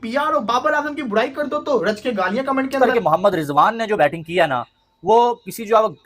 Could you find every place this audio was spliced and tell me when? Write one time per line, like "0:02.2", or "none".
0:02.8